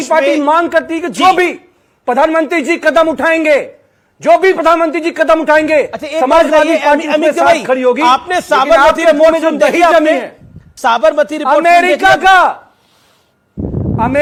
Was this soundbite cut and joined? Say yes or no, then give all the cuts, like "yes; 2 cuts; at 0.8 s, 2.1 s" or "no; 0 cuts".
no; 0 cuts